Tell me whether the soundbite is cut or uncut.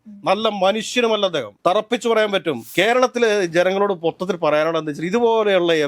cut